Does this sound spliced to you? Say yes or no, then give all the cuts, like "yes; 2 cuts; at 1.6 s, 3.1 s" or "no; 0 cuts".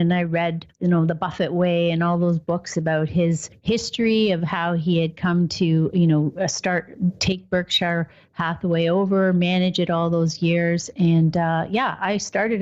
yes; 1 cut; at 2.7 s